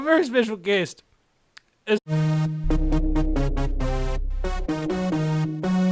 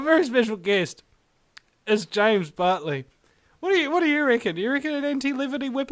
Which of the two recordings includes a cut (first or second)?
second